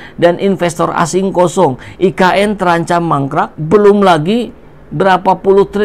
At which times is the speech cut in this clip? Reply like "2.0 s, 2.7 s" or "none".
3.6 s